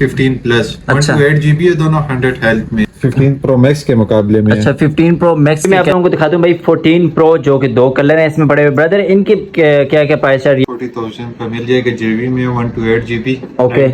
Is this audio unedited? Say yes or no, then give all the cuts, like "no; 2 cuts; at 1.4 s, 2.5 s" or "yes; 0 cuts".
no; 3 cuts; at 2.9 s, 5.7 s, 10.6 s